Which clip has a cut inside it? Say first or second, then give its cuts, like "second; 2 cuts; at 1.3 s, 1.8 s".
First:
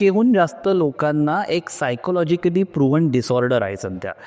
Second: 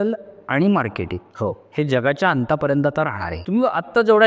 second; 1 cut; at 3.3 s